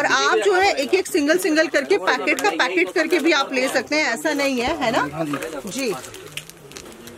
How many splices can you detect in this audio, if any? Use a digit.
0